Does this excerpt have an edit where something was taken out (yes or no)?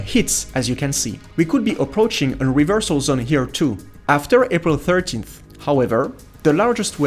yes